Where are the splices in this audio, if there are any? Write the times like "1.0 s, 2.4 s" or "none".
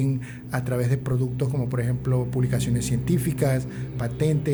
none

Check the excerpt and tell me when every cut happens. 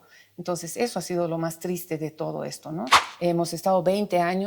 3.0 s

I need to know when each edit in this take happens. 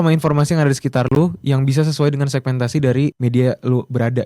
3.2 s

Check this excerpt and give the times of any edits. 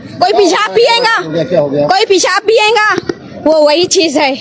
none

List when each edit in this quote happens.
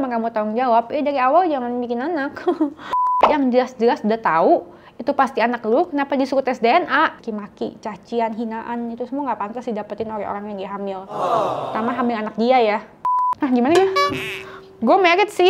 3.2 s, 7.2 s, 13.4 s

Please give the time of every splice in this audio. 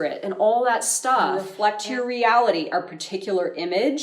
1.5 s

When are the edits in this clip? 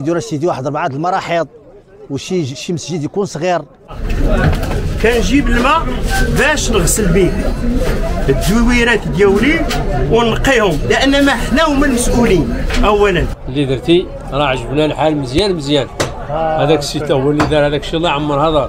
4.0 s, 13.4 s

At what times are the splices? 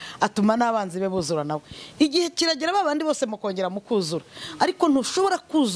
none

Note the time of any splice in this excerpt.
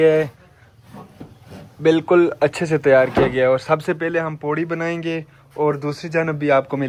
none

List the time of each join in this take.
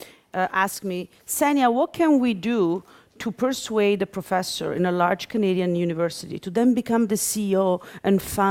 4.2 s

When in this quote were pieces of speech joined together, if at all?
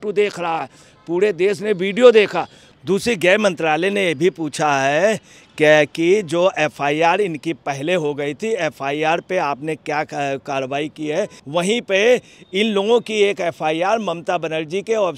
2.7 s, 11.4 s

